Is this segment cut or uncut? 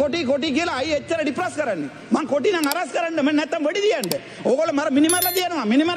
uncut